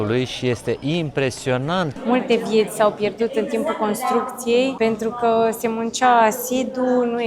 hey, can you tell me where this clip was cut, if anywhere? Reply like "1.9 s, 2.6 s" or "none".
1.9 s, 4.7 s